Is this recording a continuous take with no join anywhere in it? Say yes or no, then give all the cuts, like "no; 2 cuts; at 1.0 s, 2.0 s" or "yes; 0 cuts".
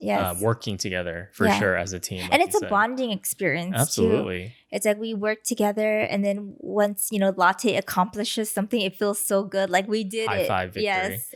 yes; 0 cuts